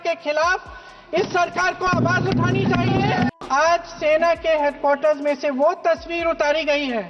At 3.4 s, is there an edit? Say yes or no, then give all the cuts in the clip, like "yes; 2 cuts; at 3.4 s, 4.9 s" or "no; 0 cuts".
yes; 1 cut; at 3.4 s